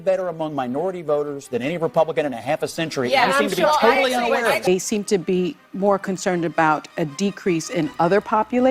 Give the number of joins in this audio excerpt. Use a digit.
1